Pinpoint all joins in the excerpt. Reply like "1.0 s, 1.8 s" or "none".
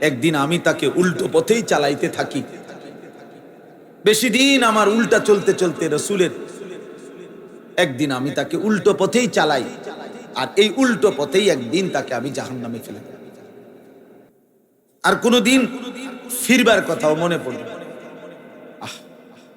14.3 s

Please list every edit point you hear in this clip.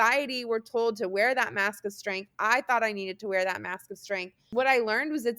4.4 s

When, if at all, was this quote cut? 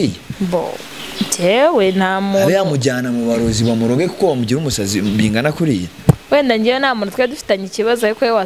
none

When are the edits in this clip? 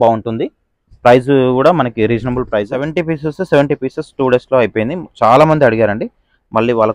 2.9 s

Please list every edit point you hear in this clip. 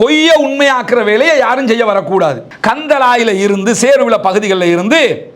2.5 s

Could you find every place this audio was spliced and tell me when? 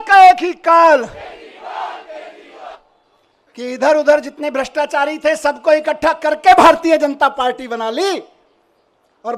2.7 s

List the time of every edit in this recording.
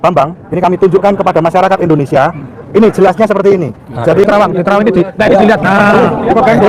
4.2 s

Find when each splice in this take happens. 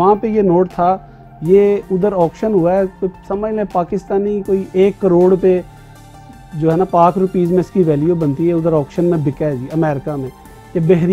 none

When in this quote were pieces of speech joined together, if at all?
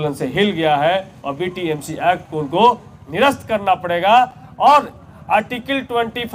none

